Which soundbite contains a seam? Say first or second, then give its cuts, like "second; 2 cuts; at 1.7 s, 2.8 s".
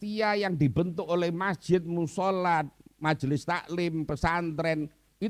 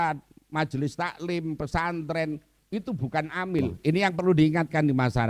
second; 1 cut; at 3.7 s